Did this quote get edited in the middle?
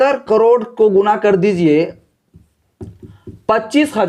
no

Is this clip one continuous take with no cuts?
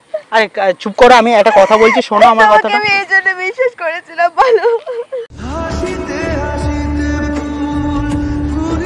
yes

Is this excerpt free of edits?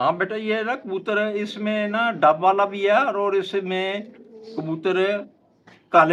yes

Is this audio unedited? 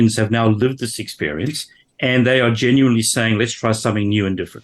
yes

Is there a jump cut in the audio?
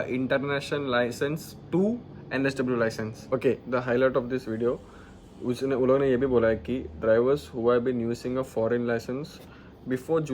yes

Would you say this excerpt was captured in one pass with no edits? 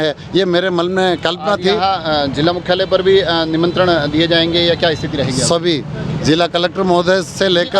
yes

